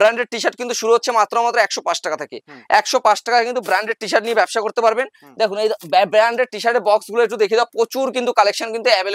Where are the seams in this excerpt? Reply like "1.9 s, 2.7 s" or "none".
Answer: none